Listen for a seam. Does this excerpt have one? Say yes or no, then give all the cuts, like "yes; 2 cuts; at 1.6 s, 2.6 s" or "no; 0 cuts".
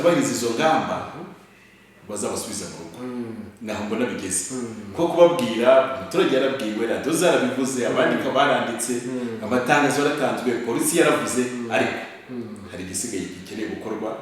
no; 0 cuts